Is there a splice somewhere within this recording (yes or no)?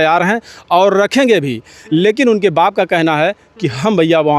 no